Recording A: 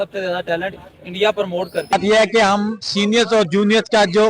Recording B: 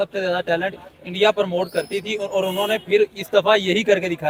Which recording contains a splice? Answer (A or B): A